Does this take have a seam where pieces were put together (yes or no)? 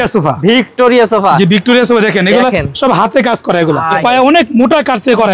yes